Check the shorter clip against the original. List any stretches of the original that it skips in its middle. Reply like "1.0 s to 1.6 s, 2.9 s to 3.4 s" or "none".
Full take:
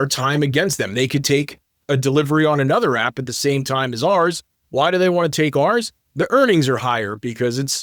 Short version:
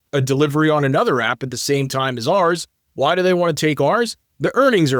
none